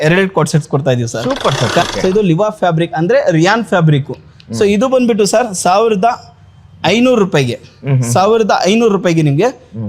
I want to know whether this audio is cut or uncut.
cut